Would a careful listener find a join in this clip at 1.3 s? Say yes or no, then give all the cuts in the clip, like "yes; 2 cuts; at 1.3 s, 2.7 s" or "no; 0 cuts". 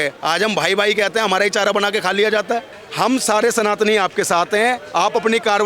no; 1 cut; at 2.8 s